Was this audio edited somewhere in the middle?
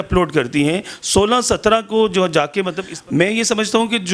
yes; 1 cut; at 2.8 s

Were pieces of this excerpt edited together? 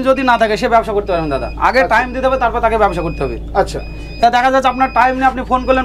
no; 0 cuts

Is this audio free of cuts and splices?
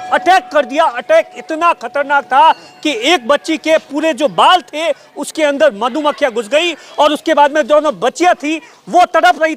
yes; 0 cuts

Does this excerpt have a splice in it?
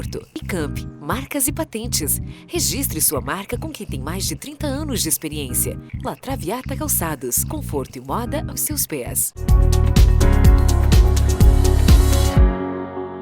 yes; 1 cut; at 9.5 s

